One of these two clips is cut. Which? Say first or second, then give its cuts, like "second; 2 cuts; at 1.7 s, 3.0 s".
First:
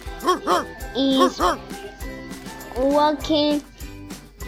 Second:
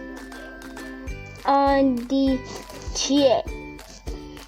second; 2 cuts; at 1.4 s, 3.5 s